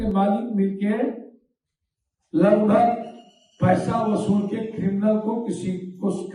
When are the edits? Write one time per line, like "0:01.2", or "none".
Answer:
none